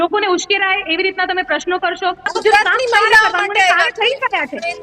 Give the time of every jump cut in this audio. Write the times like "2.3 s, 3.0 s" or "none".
2.3 s